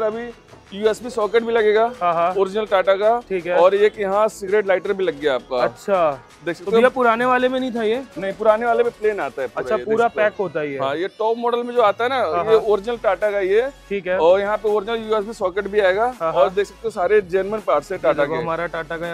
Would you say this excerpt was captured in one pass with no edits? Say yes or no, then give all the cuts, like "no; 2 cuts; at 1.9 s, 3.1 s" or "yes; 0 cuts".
yes; 0 cuts